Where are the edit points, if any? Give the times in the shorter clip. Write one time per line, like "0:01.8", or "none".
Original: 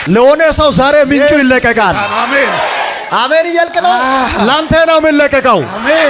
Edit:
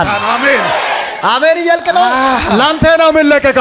none

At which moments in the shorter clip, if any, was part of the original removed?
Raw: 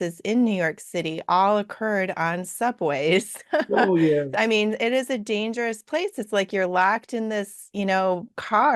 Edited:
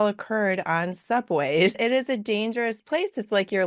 0:01.8

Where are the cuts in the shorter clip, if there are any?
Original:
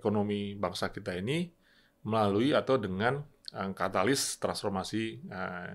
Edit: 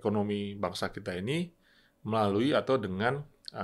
none

